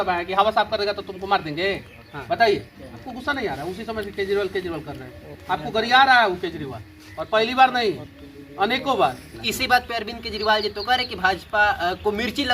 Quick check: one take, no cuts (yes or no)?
no